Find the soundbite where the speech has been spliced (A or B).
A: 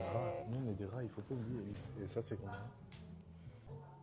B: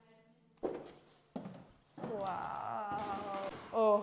B